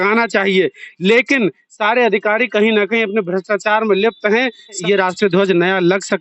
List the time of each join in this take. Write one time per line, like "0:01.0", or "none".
0:04.8

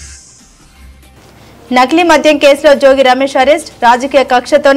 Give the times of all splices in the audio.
none

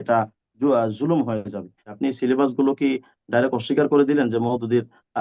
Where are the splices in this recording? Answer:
0:01.8

